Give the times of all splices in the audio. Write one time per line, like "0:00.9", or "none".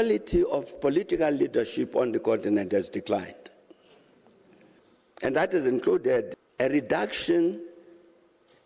0:04.8
0:06.3